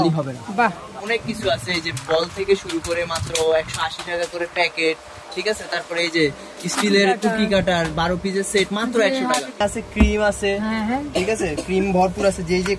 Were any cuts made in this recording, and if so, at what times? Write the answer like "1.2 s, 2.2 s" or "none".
1.0 s, 9.6 s